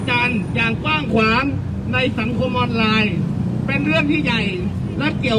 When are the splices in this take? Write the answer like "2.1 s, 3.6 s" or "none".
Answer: none